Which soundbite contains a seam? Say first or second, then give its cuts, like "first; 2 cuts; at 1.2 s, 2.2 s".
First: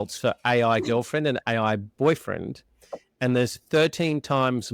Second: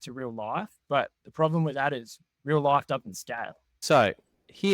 second; 1 cut; at 3.8 s